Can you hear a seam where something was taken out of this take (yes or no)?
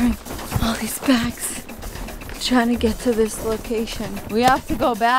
yes